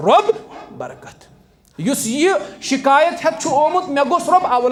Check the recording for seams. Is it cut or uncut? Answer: uncut